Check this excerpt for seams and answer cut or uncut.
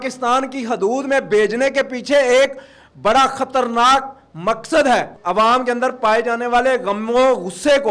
cut